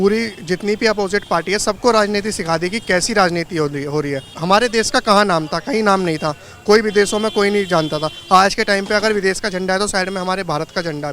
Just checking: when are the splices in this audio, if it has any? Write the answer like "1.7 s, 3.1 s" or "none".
4.3 s